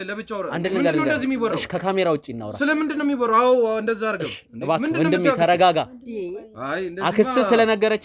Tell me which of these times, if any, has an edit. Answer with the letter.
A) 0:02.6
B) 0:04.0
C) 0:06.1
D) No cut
D